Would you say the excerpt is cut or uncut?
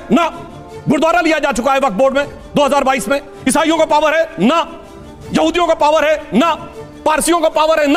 uncut